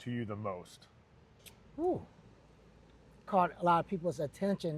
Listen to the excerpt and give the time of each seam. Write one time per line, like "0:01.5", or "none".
0:02.2